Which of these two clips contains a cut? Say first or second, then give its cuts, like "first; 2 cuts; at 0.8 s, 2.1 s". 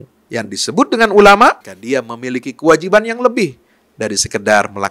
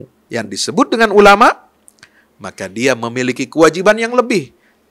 first; 1 cut; at 1.7 s